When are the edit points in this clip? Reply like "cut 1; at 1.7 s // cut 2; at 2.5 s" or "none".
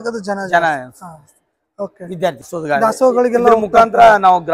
cut 1; at 2.5 s